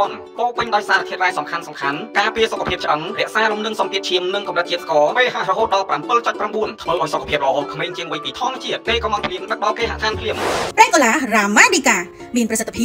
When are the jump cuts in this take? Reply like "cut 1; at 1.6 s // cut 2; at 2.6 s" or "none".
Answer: none